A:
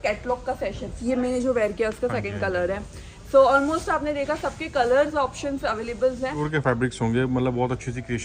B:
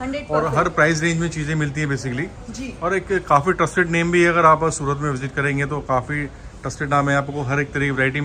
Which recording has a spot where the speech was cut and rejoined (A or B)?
A